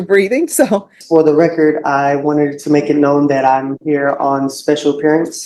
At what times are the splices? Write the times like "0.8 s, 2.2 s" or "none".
1.0 s